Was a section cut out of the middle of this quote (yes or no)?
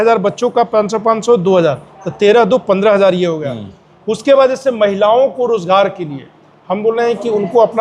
no